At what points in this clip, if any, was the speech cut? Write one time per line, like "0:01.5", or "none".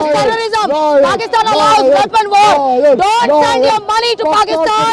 none